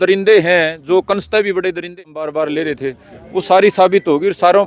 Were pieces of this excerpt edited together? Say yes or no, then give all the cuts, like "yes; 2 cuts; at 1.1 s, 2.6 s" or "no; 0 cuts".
yes; 1 cut; at 1.9 s